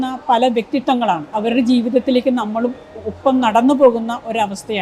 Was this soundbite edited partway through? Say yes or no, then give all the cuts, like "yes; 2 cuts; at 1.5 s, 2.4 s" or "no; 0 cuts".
yes; 1 cut; at 1.4 s